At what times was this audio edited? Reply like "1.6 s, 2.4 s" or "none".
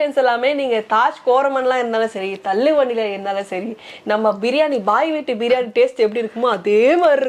none